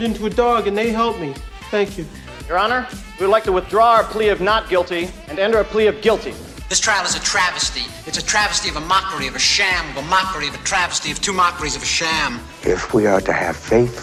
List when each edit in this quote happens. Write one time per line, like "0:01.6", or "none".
none